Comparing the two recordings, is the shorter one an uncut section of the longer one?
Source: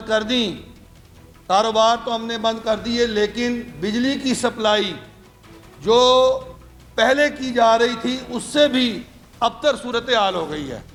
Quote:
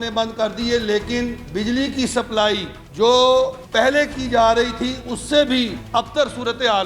no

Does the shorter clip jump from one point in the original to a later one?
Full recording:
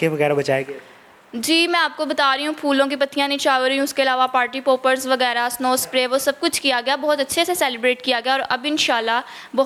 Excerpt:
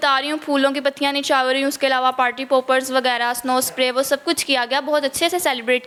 no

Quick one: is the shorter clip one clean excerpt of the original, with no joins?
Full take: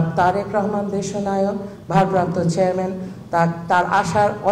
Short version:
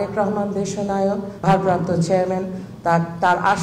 no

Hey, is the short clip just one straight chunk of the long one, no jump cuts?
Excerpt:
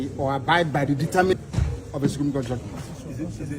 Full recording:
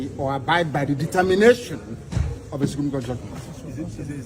no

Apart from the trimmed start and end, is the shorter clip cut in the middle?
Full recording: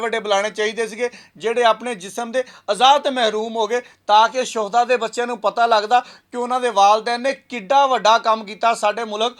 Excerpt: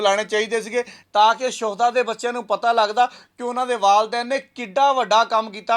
yes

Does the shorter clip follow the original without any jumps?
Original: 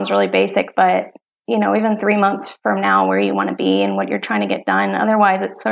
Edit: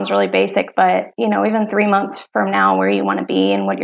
no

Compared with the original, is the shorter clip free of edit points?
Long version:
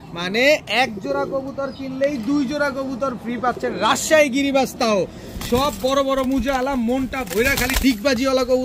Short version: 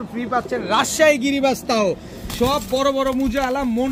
yes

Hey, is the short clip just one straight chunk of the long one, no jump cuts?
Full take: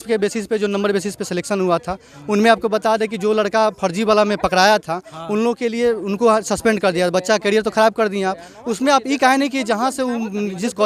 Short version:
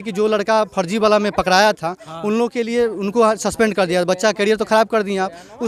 yes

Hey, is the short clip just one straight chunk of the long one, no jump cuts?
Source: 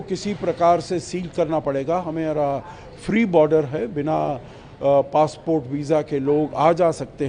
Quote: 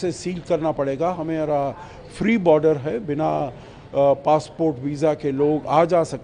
yes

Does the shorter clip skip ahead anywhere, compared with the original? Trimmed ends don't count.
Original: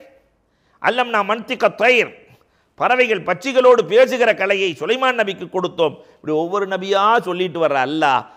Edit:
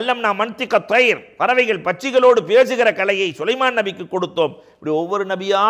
yes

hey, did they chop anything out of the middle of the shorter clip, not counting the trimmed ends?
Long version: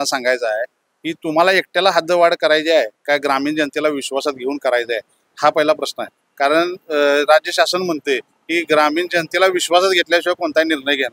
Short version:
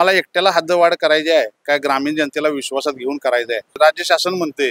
yes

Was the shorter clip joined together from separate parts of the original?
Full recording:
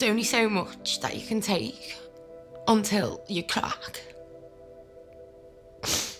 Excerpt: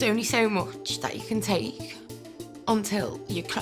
no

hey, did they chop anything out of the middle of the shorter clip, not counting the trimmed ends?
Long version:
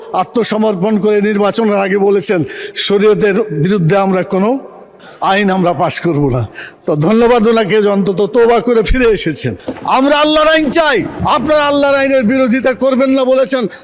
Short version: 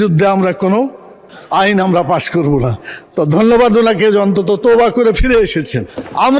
no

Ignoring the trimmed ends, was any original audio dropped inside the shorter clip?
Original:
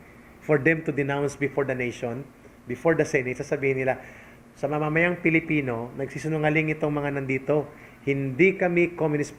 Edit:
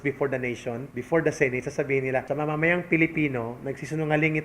yes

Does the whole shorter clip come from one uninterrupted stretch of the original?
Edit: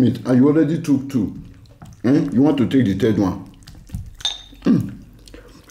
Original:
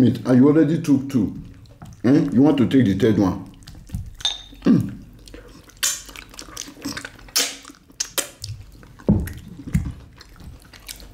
yes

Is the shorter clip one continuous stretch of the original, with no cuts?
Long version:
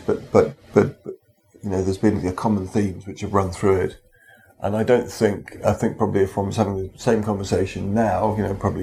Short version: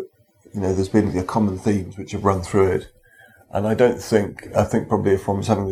yes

